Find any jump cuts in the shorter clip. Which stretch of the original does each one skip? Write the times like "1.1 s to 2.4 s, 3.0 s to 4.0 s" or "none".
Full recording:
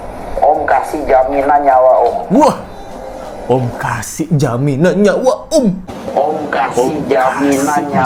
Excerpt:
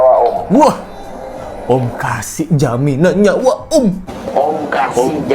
none